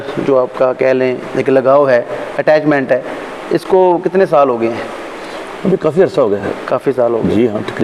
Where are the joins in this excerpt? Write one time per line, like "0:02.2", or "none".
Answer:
none

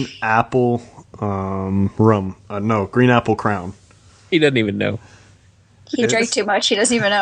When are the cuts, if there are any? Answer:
none

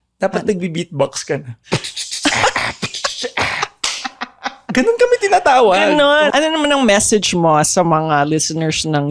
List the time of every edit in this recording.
0:01.6
0:06.3

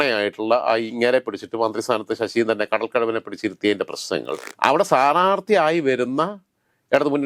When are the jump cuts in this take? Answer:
0:04.5

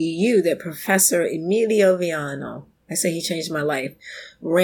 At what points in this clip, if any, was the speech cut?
none

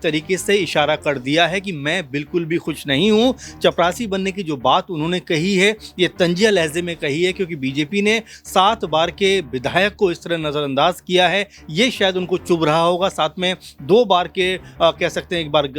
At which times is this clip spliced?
none

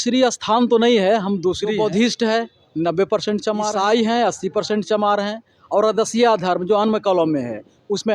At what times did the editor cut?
0:01.7
0:03.7

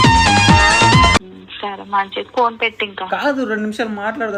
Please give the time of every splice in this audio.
0:01.2

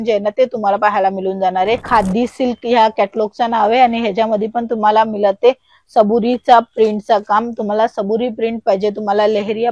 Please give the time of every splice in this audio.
0:01.8

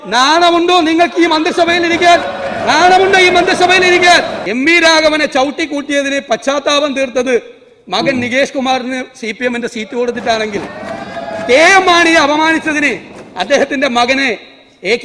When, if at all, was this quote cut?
0:04.4

